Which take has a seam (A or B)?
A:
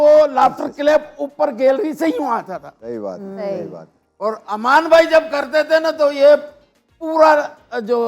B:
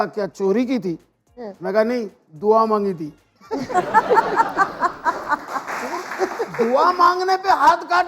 B